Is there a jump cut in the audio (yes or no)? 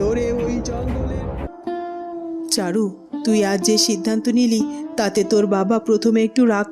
yes